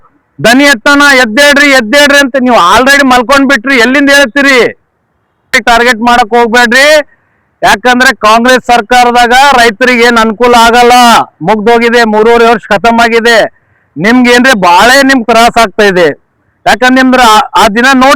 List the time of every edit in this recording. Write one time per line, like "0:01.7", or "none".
0:05.6